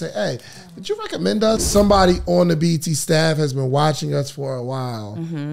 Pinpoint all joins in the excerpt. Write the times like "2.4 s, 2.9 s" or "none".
1.6 s